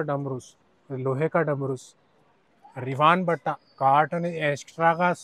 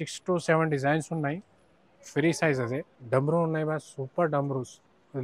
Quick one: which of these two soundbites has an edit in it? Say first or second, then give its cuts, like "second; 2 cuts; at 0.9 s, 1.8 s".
second; 1 cut; at 2.9 s